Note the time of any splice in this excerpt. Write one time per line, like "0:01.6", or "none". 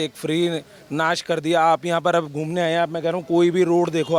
none